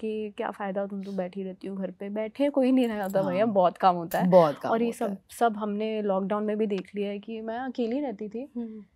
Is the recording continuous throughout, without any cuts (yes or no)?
yes